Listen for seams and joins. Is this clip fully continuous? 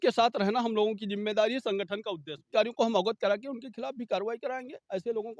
no; 1 cut; at 2.5 s

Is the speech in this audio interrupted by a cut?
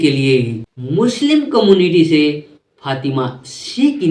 yes; 1 cut; at 1.1 s

